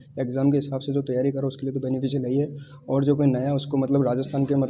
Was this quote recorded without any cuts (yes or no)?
yes